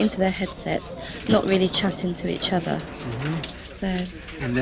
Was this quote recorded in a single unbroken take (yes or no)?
no